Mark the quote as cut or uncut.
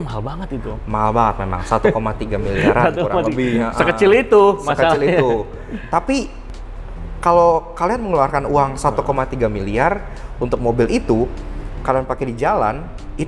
uncut